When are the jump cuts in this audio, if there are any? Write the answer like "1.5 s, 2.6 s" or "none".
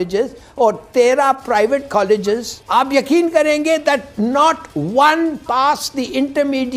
2.5 s